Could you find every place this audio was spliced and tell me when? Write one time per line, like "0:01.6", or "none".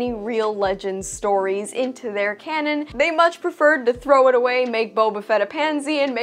0:02.9